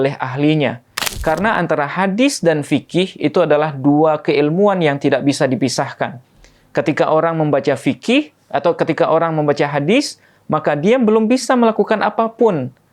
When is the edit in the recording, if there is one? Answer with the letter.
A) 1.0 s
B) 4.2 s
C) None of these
A